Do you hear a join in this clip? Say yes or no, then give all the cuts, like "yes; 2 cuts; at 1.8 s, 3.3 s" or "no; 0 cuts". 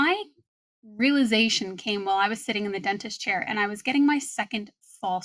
no; 0 cuts